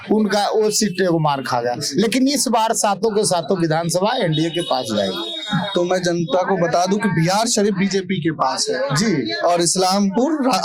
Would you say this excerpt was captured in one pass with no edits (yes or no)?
yes